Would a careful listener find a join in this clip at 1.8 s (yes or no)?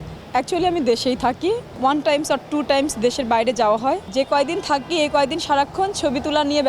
yes